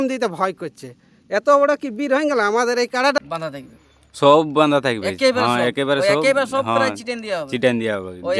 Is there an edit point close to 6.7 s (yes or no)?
no